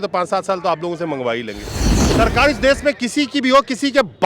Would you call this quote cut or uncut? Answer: cut